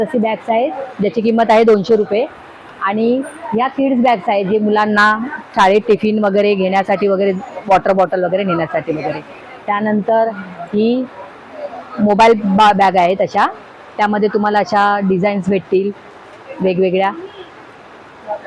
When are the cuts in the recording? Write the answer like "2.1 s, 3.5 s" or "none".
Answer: none